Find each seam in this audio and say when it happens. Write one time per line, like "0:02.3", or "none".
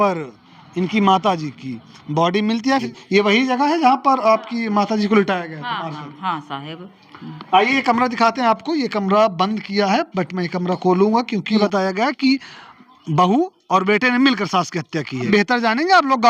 0:02.9
0:11.6
0:15.3